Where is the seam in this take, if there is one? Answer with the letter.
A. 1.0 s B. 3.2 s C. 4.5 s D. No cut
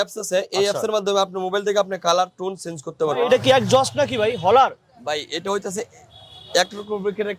B